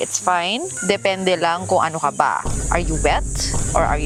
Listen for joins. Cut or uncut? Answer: uncut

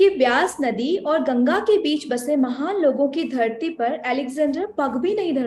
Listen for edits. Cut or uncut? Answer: uncut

